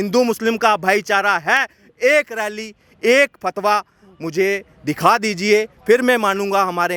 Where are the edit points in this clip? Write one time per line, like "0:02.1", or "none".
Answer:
none